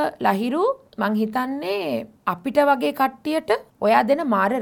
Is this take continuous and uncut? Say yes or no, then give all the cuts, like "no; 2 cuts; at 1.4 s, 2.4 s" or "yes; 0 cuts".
no; 3 cuts; at 0.9 s, 2.1 s, 3.7 s